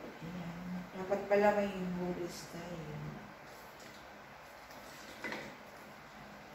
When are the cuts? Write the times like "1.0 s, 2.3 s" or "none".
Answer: none